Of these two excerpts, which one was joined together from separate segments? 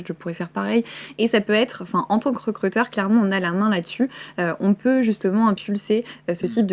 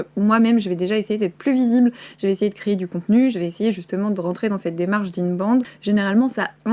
second; 1 cut; at 5.8 s

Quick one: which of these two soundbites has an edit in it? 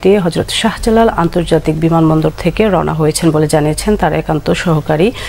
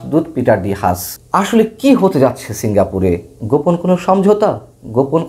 second; 2 cuts; at 1.1 s, 3.3 s

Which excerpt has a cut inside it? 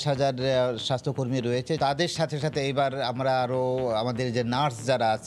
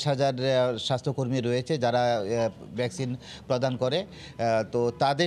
first; 1 cut; at 1.8 s

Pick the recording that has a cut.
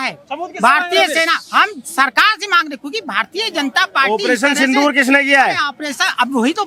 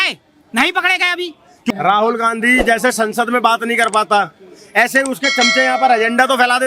second; 1 cut; at 1.7 s

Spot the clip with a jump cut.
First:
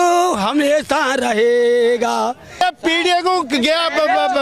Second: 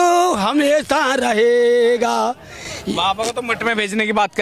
first; 1 cut; at 2.6 s

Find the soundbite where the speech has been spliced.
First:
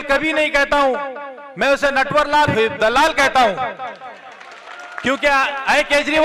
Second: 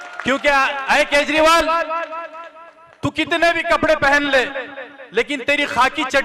first; 1 cut; at 2.5 s

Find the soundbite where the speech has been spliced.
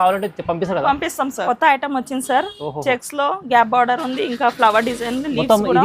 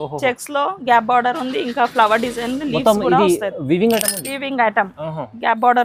first; 1 cut; at 1.4 s

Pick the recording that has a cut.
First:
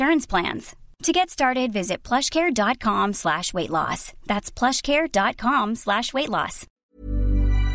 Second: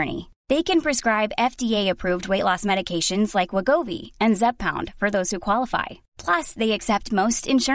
first; 1 cut; at 6.7 s

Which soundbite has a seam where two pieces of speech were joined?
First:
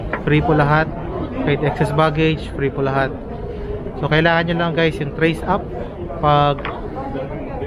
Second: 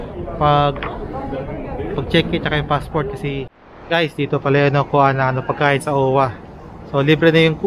second; 1 cut; at 3.5 s

